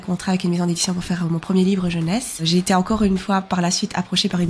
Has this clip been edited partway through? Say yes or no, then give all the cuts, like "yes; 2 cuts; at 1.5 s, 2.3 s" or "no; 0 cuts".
yes; 1 cut; at 2.4 s